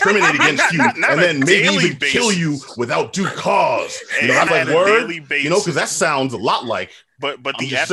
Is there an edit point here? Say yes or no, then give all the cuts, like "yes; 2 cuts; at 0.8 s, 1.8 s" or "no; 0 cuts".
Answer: yes; 1 cut; at 4.5 s